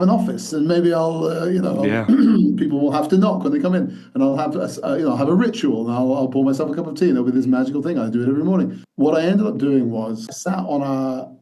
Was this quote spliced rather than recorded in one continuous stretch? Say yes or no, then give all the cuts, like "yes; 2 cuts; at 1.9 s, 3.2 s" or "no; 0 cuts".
yes; 2 cuts; at 8.8 s, 10.3 s